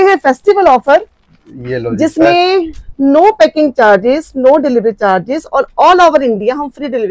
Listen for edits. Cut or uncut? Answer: uncut